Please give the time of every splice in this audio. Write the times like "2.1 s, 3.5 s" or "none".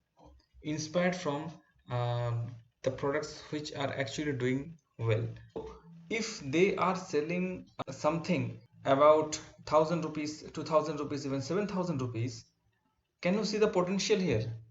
5.6 s, 7.7 s, 8.6 s